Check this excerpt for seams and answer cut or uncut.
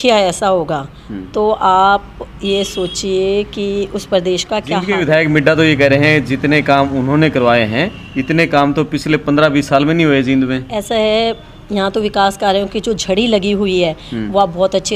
cut